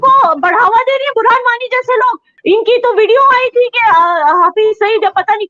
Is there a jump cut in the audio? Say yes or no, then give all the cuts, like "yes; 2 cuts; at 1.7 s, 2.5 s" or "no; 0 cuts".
yes; 1 cut; at 2.2 s